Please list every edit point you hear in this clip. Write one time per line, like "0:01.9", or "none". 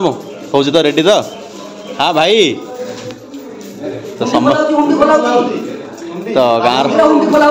none